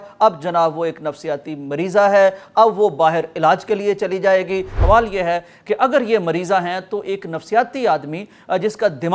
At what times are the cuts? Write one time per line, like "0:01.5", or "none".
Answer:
0:04.7